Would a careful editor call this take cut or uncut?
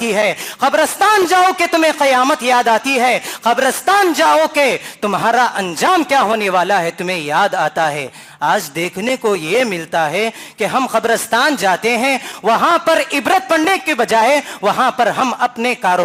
uncut